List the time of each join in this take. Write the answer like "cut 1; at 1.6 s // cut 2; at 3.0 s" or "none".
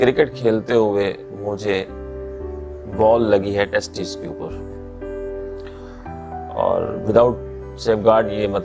none